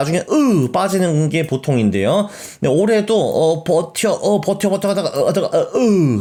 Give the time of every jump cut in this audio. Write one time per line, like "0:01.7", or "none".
none